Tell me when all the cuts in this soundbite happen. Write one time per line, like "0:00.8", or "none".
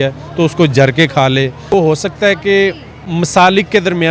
0:01.7